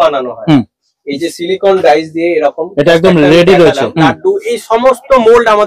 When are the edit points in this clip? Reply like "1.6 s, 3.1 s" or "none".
3.9 s